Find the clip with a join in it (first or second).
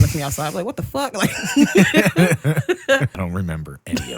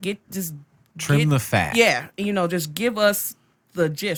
first